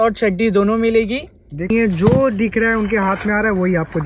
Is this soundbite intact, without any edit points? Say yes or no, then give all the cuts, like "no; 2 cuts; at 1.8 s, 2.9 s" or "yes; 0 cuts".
no; 1 cut; at 1.7 s